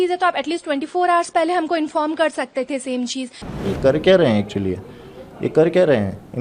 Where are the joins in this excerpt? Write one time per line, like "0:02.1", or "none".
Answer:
0:03.7

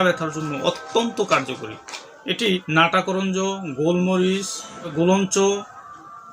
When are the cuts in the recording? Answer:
0:02.6
0:04.9

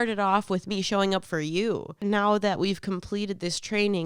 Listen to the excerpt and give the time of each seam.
0:01.9

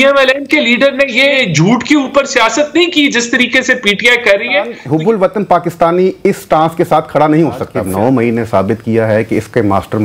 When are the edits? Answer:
0:01.3
0:04.8
0:07.8

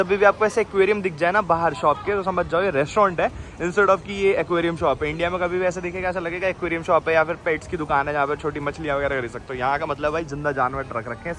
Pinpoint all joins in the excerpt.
none

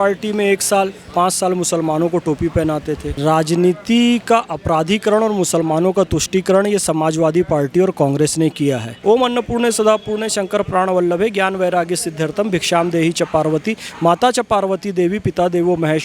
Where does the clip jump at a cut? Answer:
0:03.1
0:08.9

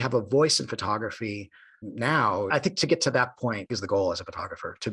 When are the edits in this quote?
0:02.5
0:03.7

